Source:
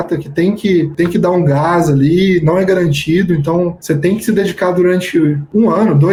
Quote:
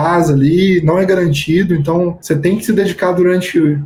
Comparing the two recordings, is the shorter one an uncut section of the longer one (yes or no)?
yes